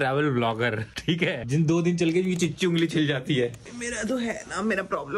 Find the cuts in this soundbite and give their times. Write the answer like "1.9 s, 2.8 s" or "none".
none